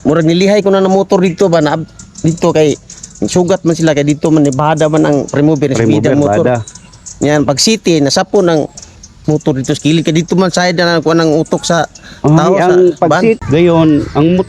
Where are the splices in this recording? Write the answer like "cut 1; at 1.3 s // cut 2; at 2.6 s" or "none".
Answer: cut 1; at 13.4 s